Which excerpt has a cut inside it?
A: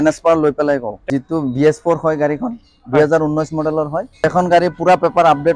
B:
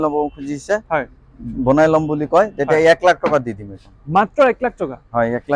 A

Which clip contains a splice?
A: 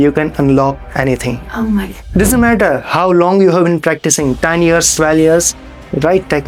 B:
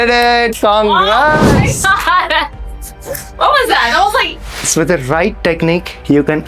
B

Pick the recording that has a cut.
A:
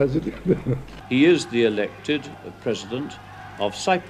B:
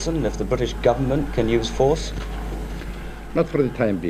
A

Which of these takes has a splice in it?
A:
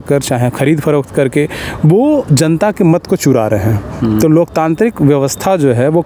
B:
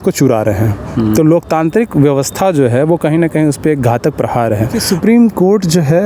B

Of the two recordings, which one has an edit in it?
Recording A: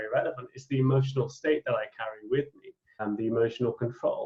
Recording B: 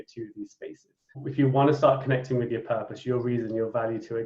B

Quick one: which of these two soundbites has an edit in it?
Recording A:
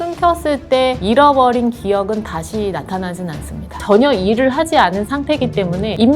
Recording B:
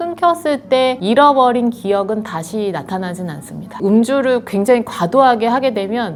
A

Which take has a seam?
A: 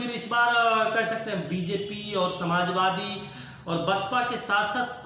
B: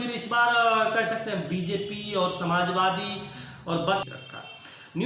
B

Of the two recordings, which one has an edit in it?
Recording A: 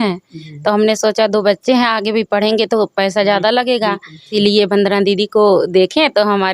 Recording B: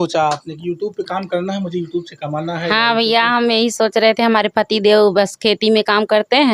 A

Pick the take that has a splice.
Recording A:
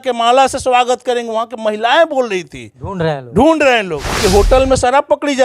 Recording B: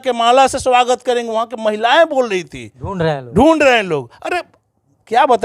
A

